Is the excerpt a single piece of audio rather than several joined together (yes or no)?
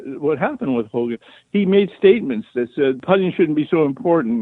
no